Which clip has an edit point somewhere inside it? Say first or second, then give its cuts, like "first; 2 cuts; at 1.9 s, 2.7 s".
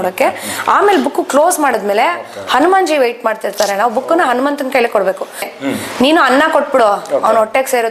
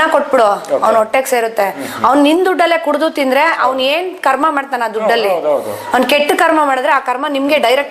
first; 1 cut; at 5.5 s